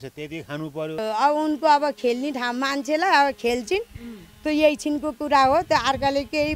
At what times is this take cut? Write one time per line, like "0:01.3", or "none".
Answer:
0:01.0